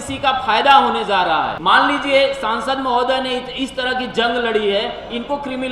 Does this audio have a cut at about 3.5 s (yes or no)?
no